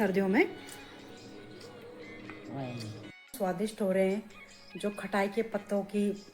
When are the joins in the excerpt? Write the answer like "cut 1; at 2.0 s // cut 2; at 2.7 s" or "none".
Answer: cut 1; at 3.3 s